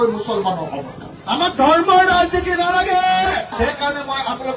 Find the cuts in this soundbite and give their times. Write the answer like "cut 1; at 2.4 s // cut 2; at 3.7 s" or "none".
cut 1; at 1.0 s // cut 2; at 3.5 s